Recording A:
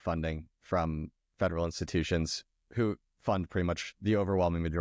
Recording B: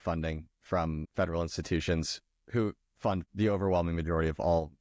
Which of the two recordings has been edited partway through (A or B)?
B